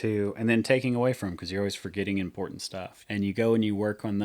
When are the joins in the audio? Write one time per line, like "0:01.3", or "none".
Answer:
0:03.0